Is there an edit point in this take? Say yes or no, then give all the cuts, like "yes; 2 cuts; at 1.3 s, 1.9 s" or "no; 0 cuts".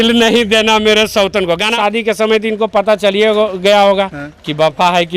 yes; 1 cut; at 1.7 s